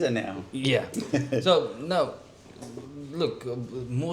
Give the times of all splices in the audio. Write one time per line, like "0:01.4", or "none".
none